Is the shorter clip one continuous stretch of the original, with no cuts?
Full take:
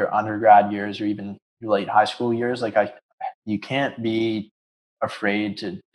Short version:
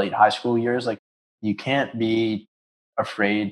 no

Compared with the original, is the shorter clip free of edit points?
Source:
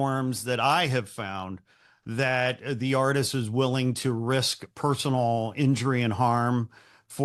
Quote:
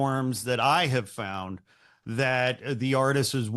yes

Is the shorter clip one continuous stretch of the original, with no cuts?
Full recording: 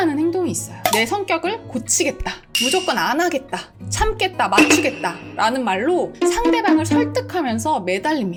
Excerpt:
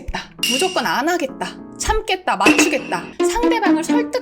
no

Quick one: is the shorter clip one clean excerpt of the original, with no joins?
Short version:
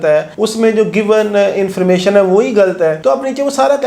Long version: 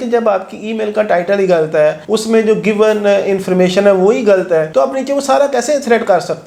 yes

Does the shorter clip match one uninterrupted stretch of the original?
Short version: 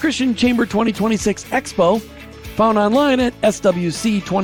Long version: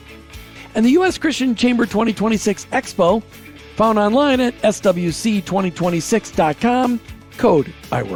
yes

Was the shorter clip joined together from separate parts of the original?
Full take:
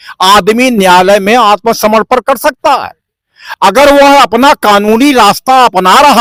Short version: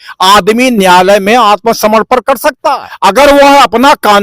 yes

